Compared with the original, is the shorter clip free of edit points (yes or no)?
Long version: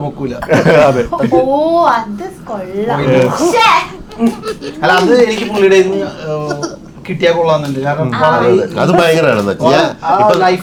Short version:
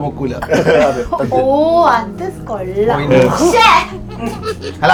yes